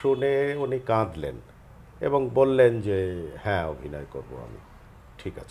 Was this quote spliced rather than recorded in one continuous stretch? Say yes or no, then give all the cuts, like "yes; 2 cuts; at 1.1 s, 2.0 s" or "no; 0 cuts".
no; 0 cuts